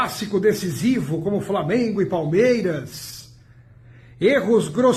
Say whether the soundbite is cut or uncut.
uncut